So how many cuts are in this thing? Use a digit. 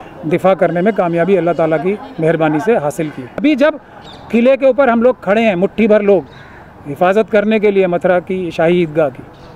1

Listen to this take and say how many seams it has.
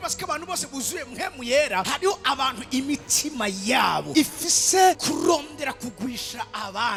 0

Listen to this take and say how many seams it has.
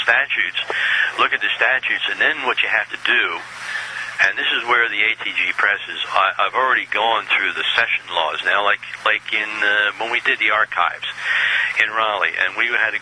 0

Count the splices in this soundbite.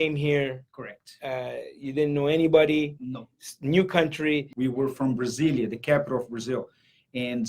1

